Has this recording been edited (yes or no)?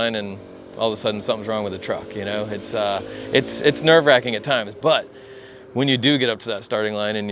no